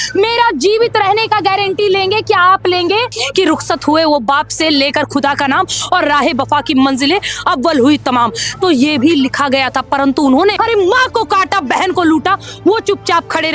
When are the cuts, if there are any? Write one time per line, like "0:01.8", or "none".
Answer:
0:03.2
0:10.6